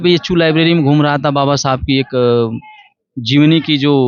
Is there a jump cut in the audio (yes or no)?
no